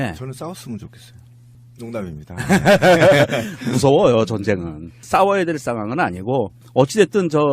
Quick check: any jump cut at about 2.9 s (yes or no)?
yes